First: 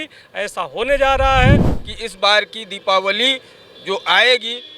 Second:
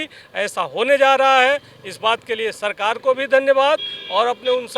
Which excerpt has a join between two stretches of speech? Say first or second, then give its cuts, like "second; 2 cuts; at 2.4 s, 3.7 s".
first; 1 cut; at 1.8 s